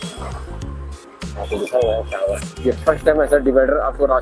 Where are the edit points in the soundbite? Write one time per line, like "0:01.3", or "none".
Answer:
0:02.5